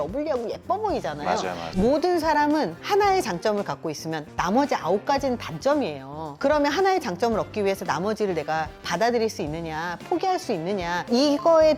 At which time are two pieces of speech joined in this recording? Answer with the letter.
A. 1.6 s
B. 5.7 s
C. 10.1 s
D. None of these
A